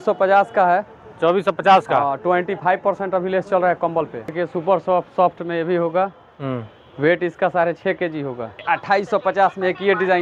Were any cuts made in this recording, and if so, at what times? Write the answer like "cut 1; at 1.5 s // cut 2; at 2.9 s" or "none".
cut 1; at 4.3 s // cut 2; at 8.6 s